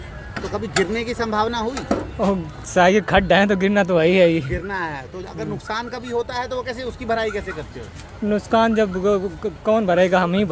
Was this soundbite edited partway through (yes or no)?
no